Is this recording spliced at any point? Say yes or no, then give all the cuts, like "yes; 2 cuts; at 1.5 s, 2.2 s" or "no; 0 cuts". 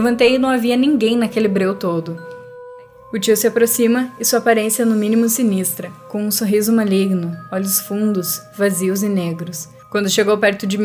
yes; 1 cut; at 2.4 s